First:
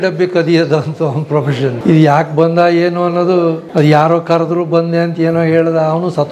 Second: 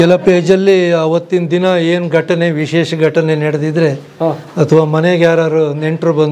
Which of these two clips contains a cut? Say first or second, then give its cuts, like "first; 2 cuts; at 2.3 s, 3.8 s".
first; 2 cuts; at 1.8 s, 3.6 s